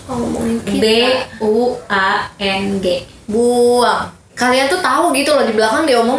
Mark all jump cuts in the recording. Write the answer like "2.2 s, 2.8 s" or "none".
4.3 s